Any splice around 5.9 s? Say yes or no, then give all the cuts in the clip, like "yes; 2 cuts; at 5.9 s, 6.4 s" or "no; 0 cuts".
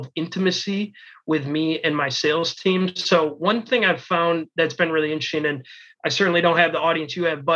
no; 0 cuts